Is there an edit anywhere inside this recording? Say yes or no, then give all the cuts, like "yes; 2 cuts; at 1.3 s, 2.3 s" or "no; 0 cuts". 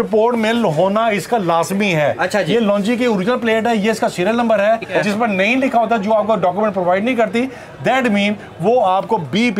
yes; 1 cut; at 5.0 s